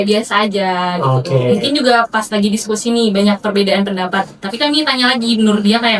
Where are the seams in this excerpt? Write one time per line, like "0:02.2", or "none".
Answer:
none